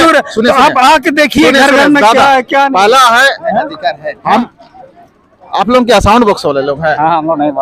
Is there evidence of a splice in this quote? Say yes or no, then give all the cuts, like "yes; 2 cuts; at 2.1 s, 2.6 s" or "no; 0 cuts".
yes; 1 cut; at 4.5 s